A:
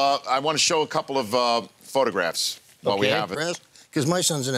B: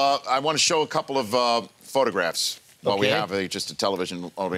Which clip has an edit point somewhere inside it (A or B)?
B